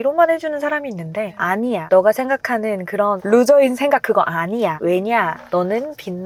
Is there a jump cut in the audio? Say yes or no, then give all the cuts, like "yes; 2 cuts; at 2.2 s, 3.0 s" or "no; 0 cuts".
no; 0 cuts